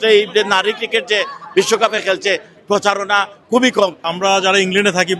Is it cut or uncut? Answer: cut